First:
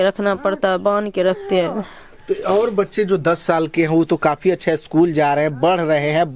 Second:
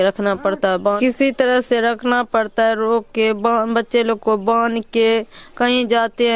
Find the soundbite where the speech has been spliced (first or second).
second